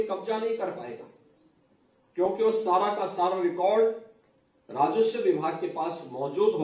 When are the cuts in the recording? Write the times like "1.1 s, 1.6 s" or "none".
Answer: none